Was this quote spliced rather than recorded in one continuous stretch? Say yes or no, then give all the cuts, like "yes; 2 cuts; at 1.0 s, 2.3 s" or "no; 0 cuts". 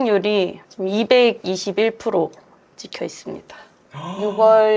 no; 0 cuts